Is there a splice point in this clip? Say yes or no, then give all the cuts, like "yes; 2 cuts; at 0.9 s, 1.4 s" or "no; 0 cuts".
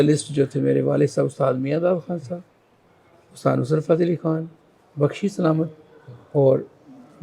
no; 0 cuts